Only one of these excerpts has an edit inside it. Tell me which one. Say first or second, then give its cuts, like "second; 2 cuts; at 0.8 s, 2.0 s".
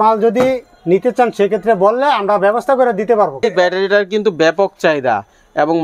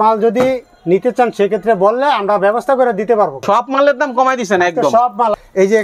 first; 1 cut; at 3.4 s